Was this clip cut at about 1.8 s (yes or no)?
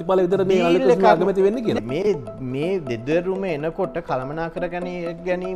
yes